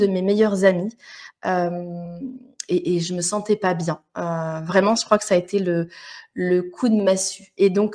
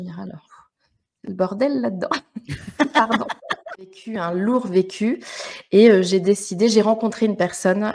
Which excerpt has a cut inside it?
second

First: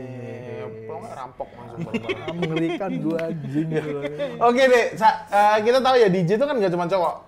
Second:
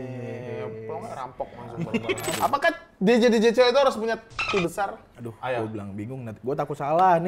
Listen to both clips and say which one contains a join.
second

